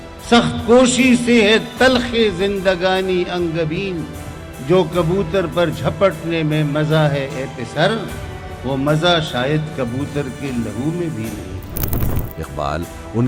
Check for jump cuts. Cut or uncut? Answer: uncut